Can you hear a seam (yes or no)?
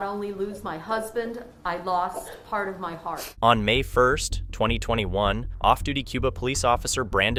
no